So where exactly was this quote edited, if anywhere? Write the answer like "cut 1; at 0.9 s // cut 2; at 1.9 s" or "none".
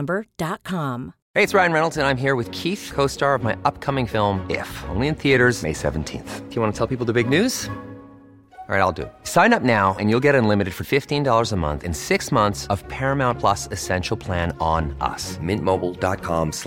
cut 1; at 1.2 s